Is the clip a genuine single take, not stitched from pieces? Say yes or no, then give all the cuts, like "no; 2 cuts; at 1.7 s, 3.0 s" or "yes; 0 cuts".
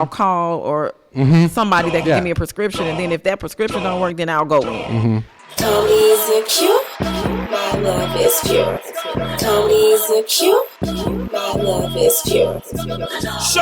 no; 1 cut; at 5.3 s